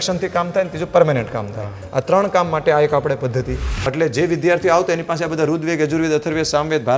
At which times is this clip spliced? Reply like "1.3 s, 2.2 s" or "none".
3.9 s